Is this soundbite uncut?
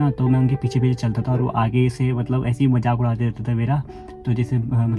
yes; 0 cuts

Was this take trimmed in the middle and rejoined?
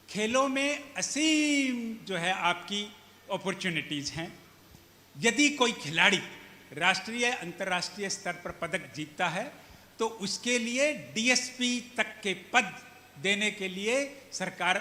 no; 0 cuts

